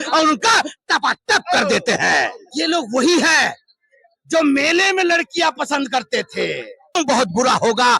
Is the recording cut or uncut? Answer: cut